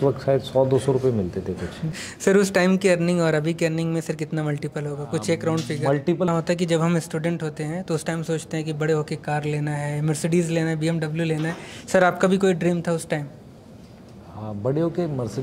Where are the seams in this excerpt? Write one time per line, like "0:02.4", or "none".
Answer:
0:01.9
0:06.3